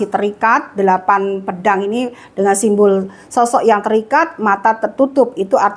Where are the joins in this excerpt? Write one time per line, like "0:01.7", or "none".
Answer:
none